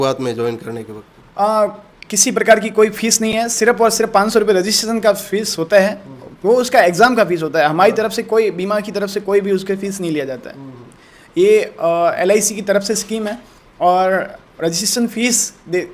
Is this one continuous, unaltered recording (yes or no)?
yes